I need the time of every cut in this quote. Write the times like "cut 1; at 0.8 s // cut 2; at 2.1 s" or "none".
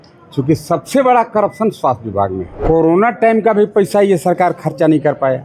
cut 1; at 2.5 s